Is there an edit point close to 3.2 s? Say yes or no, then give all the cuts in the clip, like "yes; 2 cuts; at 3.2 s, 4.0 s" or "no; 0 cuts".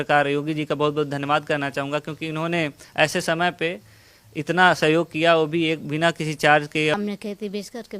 no; 1 cut; at 6.9 s